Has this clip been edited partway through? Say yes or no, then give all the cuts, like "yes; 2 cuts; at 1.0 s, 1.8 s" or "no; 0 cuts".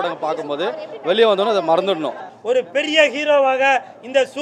yes; 1 cut; at 2.3 s